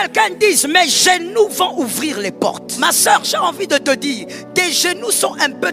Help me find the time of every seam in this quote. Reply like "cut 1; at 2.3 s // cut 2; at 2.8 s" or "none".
cut 1; at 2.7 s